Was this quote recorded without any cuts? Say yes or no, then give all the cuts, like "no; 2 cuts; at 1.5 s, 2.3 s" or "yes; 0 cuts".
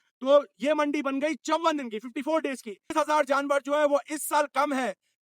no; 1 cut; at 2.9 s